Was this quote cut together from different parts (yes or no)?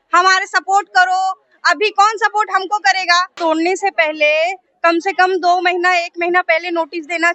yes